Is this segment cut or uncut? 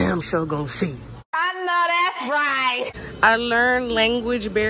cut